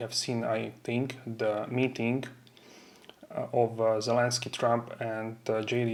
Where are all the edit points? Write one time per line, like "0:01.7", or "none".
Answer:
none